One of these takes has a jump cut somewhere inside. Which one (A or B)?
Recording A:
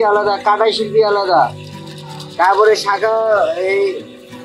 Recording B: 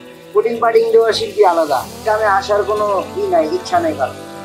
B